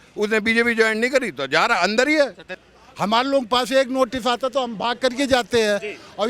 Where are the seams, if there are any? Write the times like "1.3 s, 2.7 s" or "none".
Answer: 2.5 s